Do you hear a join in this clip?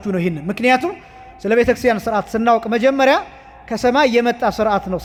no; 0 cuts

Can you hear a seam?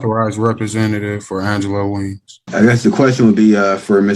yes; 1 cut; at 2.5 s

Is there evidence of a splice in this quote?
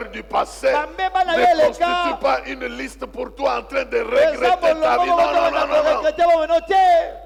no; 0 cuts

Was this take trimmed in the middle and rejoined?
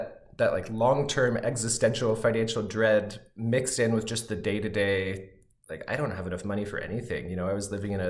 no; 0 cuts

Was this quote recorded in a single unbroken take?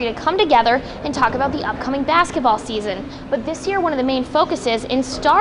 yes; 0 cuts

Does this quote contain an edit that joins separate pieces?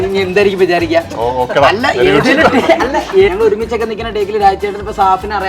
yes; 1 cut; at 3.3 s

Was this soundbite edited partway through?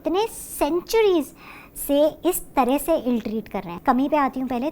yes; 1 cut; at 3.8 s

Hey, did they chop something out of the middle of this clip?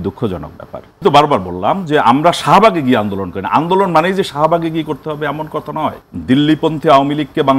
yes; 2 cuts; at 1.0 s, 6.1 s

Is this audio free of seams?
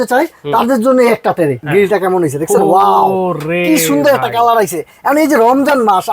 no; 1 cut; at 1.6 s

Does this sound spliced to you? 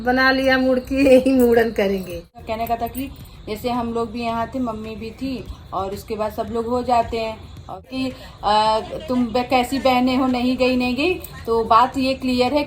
yes; 2 cuts; at 2.4 s, 7.9 s

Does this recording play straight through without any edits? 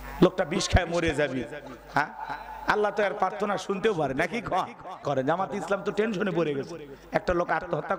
no; 1 cut; at 5.0 s

